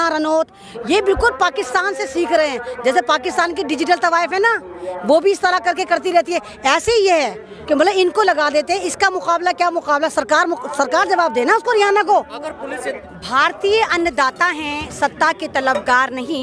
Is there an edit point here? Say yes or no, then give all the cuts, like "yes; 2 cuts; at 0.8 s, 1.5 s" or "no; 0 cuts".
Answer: yes; 1 cut; at 12.9 s